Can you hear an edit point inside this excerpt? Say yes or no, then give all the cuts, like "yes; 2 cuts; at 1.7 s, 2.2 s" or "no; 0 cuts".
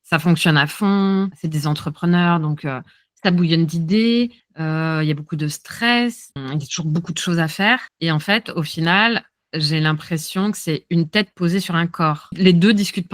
yes; 1 cut; at 6.4 s